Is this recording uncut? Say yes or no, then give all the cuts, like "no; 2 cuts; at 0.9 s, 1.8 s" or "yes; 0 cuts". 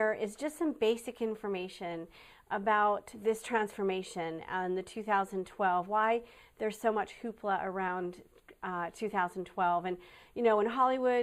no; 1 cut; at 3.6 s